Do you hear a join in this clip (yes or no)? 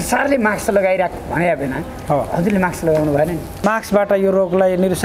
yes